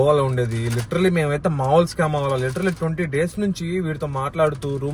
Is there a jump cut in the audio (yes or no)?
no